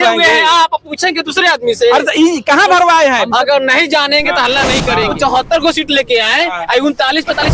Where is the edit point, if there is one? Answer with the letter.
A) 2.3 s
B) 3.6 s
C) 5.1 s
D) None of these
C